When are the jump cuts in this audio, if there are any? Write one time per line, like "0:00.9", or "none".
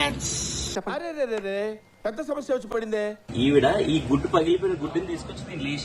0:03.2